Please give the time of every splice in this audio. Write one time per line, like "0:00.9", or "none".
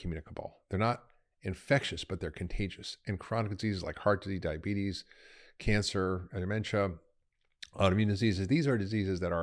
none

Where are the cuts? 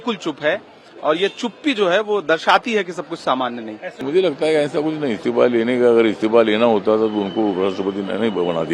0:04.0

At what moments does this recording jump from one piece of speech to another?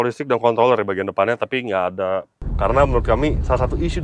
0:02.4

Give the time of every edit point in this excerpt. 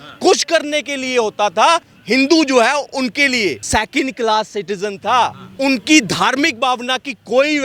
0:01.9
0:03.6
0:05.4

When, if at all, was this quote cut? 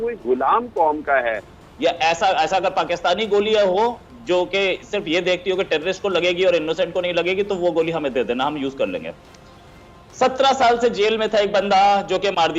0:01.5

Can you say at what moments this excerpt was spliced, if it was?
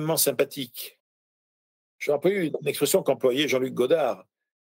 0:01.5
0:02.5

